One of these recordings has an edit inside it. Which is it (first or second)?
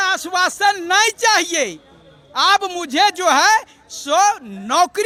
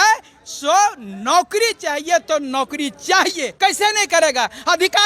second